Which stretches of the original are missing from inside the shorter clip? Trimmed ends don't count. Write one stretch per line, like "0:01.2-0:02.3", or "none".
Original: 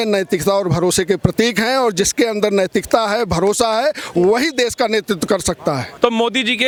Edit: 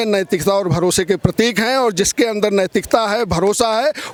none